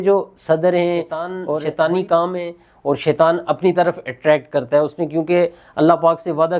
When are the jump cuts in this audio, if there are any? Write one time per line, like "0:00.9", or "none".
0:01.4